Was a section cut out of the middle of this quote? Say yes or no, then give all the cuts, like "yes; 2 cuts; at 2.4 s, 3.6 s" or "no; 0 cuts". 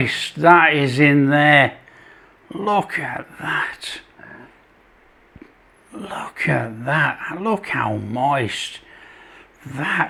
no; 0 cuts